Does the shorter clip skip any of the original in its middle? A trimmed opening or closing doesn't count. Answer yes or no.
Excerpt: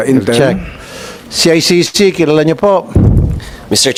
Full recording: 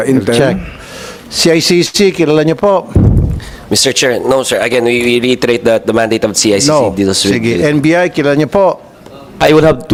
no